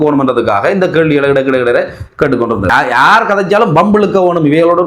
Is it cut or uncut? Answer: cut